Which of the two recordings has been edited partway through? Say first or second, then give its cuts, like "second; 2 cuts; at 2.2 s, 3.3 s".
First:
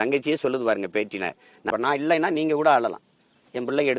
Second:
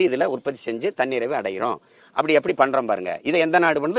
first; 1 cut; at 1.6 s